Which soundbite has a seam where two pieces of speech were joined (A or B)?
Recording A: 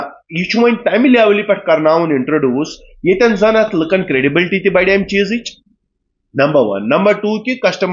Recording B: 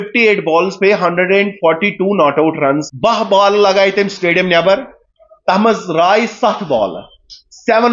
B